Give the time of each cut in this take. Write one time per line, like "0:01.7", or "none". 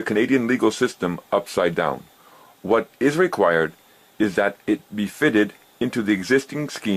none